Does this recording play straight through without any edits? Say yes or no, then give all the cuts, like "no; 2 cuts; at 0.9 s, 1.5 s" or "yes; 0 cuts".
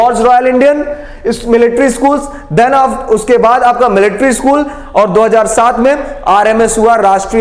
yes; 0 cuts